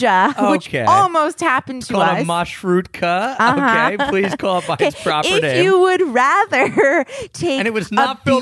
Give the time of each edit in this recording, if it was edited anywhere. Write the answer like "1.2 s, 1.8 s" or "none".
none